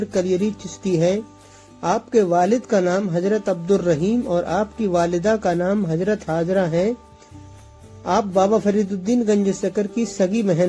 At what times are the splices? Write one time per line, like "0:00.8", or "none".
none